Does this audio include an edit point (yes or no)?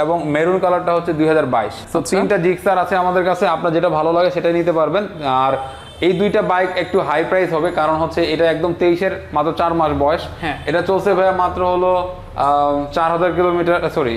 no